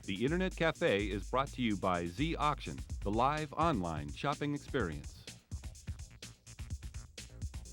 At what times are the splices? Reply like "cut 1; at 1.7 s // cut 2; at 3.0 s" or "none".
cut 1; at 5.0 s